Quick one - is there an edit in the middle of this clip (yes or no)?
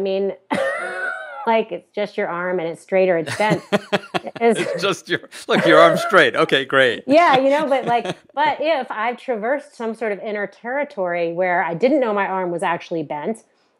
no